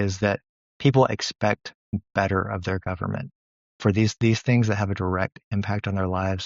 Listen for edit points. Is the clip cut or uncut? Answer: uncut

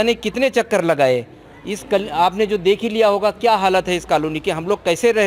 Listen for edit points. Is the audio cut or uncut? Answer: uncut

